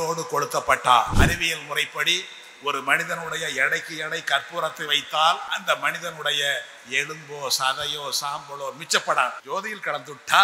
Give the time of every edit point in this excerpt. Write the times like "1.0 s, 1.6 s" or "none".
1.1 s, 5.5 s, 9.4 s